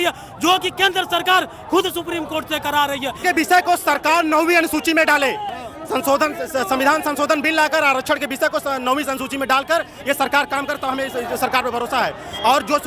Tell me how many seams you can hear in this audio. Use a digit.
1